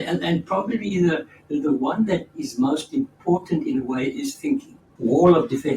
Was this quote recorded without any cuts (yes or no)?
no